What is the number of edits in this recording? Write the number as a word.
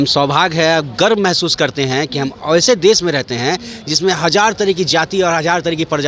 zero